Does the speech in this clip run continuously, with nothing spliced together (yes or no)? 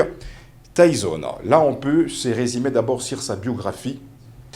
yes